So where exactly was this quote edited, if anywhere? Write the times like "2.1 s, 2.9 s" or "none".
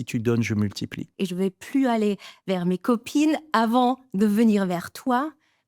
1.0 s